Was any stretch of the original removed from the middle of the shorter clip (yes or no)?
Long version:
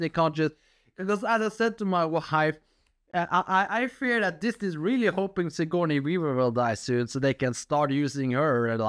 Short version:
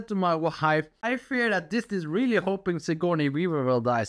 yes